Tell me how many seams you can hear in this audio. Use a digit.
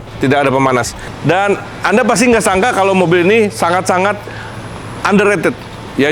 1